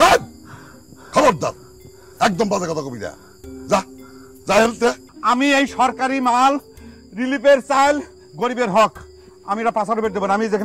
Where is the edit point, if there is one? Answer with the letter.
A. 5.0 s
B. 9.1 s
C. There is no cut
A